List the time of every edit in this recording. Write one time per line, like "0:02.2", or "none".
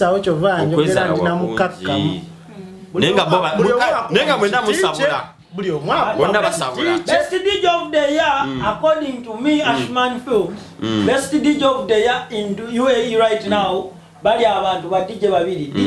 none